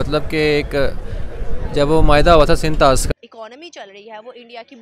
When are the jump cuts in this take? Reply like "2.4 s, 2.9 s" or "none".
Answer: 3.0 s